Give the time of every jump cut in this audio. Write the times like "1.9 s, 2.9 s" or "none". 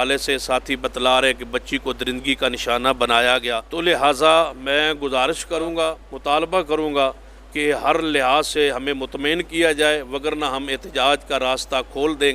3.6 s, 6.1 s

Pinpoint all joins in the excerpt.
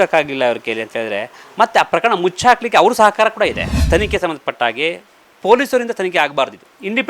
3.8 s

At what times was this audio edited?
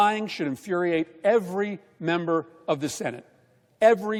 none

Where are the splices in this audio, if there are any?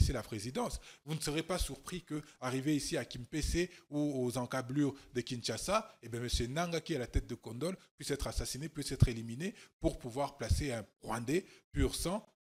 none

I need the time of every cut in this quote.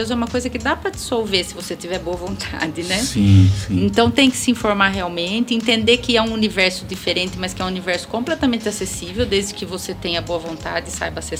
none

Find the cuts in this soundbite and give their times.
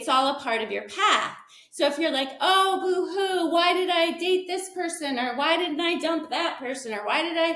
none

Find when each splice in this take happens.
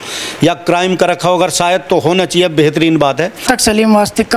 3.4 s

